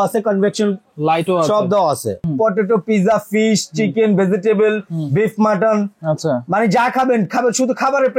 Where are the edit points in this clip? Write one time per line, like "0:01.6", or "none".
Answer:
0:02.2